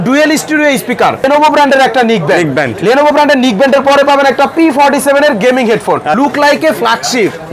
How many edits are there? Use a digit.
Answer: 2